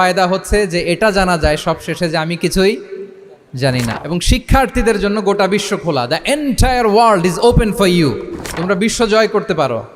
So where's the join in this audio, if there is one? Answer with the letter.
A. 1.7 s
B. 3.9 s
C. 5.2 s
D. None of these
B